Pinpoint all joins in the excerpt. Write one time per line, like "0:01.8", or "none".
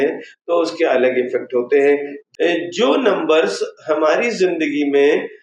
0:02.2